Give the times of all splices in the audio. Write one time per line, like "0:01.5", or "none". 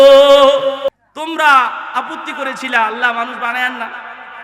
0:00.9